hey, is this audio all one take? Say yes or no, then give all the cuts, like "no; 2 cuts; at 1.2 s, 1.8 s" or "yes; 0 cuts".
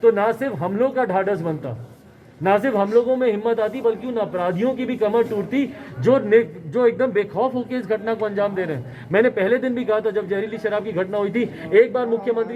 yes; 0 cuts